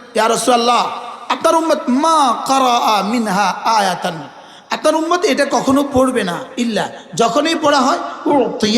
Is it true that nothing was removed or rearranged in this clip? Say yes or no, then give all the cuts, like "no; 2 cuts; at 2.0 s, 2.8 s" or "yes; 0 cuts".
yes; 0 cuts